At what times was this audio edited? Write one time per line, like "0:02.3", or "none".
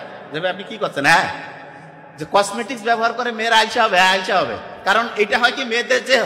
none